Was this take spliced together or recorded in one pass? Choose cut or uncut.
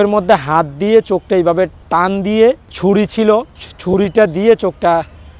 uncut